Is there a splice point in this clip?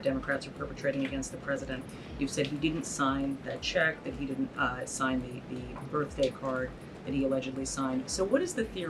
no; 0 cuts

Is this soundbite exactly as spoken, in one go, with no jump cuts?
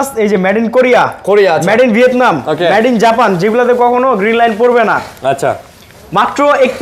yes; 0 cuts

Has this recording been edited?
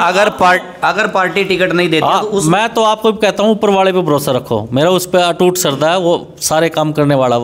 no; 0 cuts

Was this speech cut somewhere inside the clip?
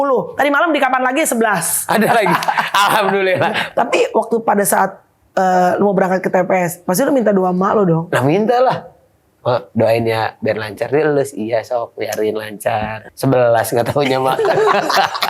yes; 3 cuts; at 3.6 s, 13.0 s, 14.4 s

